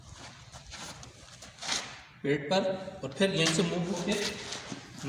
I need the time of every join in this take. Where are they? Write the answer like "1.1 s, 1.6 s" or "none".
none